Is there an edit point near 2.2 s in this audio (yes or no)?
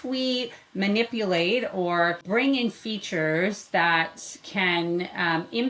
yes